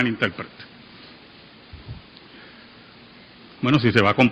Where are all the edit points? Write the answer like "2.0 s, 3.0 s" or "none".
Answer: none